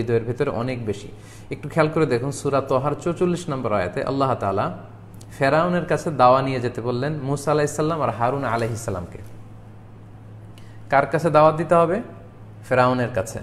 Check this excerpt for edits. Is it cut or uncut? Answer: uncut